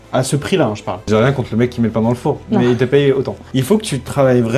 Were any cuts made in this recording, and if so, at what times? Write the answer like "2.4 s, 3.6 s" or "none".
1.1 s, 3.4 s